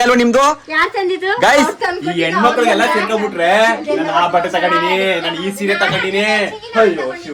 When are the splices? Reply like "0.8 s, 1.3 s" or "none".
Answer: none